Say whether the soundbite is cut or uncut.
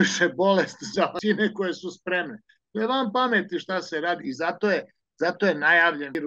cut